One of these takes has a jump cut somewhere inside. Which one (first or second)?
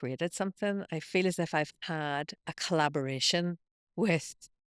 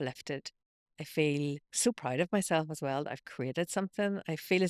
second